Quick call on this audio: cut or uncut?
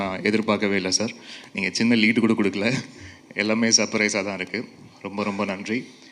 uncut